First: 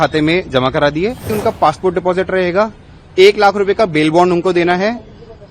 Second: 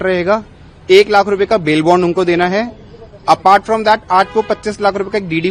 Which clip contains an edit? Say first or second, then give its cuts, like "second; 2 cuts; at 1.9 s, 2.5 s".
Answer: first; 1 cut; at 1.3 s